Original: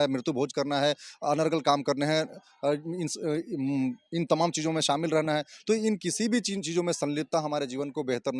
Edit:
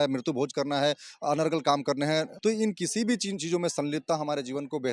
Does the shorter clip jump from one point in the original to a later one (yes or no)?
yes